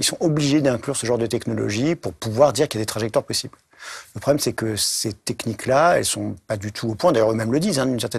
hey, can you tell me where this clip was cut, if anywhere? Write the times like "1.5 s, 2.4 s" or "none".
none